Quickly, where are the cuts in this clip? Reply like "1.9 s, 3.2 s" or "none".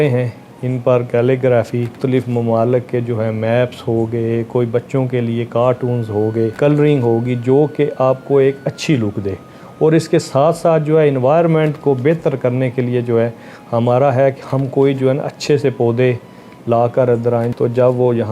2.0 s, 6.5 s, 17.5 s